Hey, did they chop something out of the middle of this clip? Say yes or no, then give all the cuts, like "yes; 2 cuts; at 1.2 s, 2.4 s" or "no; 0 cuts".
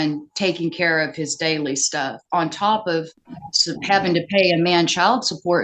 no; 0 cuts